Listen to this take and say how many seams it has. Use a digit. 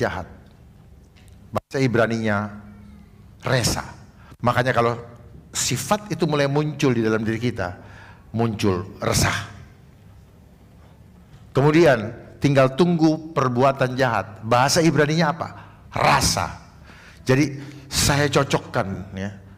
0